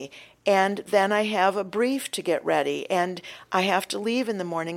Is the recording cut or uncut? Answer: uncut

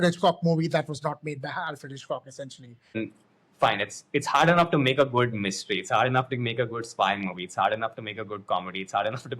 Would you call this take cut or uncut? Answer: cut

